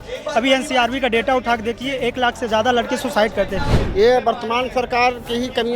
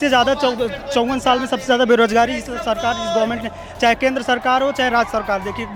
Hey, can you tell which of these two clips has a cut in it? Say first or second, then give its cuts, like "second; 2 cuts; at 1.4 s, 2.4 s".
first; 1 cut; at 3.7 s